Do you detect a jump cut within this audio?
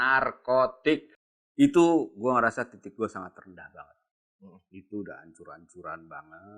yes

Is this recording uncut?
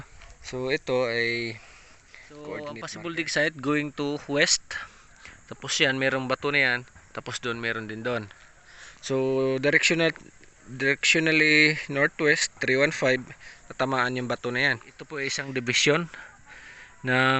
no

